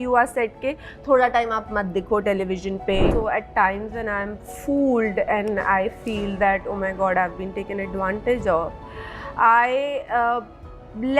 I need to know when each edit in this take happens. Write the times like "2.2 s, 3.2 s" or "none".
3.1 s